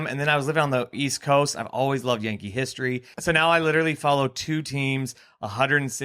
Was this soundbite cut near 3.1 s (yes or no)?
yes